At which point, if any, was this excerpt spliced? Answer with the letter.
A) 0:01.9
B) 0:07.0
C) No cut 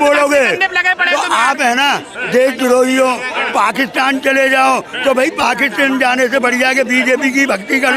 C